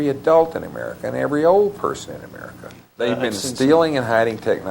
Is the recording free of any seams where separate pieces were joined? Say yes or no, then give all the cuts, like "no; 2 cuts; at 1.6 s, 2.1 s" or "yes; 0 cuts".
no; 1 cut; at 3.0 s